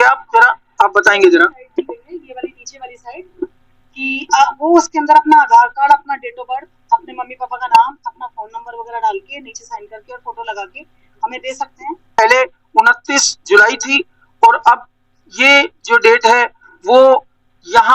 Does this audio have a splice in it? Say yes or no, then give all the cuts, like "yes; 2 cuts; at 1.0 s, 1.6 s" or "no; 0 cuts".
yes; 1 cut; at 12.1 s